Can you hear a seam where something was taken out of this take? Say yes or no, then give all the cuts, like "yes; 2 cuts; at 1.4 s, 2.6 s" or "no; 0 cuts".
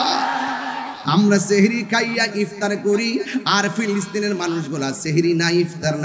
yes; 1 cut; at 1.0 s